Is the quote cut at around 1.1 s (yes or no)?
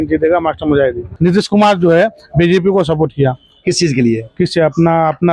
yes